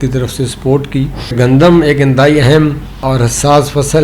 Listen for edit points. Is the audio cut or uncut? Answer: cut